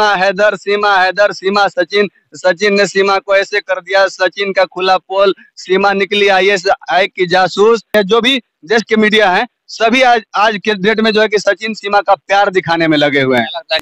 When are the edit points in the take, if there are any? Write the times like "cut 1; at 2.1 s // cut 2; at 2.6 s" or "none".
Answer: none